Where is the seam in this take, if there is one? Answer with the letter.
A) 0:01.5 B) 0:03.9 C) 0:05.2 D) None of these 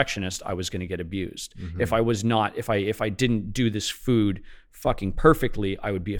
D